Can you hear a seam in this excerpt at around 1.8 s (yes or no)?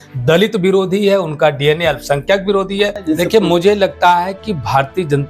no